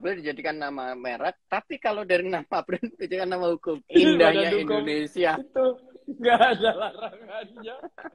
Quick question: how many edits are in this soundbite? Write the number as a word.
zero